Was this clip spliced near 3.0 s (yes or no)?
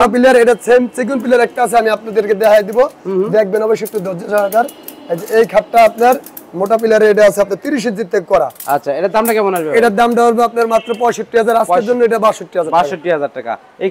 no